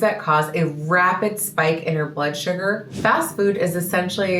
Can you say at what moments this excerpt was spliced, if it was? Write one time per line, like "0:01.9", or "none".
0:02.9